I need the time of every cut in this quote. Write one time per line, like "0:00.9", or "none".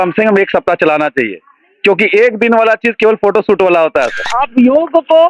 0:04.3

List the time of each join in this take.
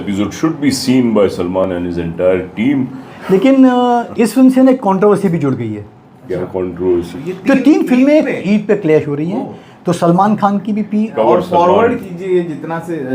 0:03.1
0:07.1
0:11.1

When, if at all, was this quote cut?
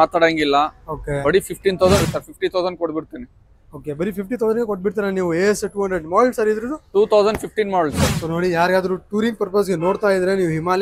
0:02.0
0:08.1

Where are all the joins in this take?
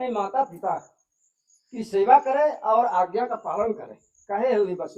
none

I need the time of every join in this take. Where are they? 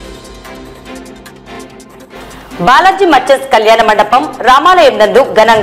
0:01.5

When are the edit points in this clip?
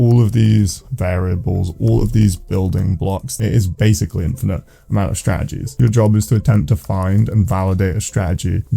0:03.4
0:05.7

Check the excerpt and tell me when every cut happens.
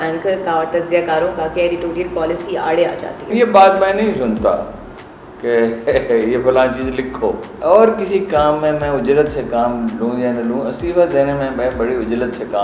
0:03.3
0:07.5

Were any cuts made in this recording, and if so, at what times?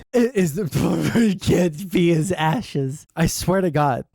0:03.0

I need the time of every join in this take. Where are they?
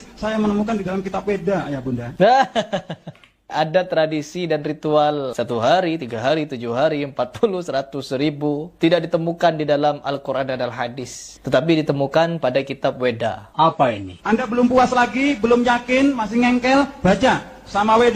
0:02.1
0:03.5
0:05.3
0:08.7
0:13.9

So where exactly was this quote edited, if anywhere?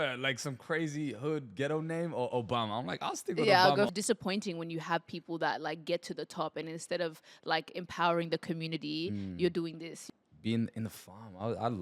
0:03.9
0:09.9

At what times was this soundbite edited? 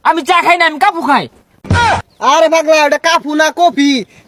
none

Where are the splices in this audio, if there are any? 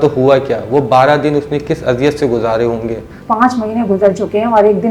0:03.1

